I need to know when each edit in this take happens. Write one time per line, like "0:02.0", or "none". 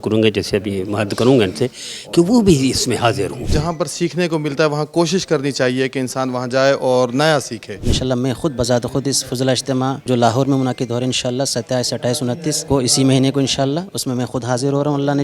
0:03.5
0:07.9
0:10.0
0:12.6